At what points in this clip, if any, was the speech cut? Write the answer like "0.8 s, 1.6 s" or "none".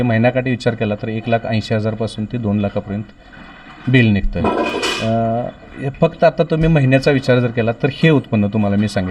none